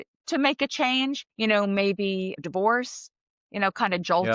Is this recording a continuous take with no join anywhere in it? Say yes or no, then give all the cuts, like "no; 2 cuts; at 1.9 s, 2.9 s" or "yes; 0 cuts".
no; 2 cuts; at 1.3 s, 2.4 s